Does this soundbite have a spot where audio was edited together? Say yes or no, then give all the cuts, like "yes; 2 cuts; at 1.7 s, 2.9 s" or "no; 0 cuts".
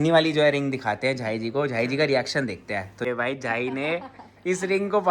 yes; 1 cut; at 3.1 s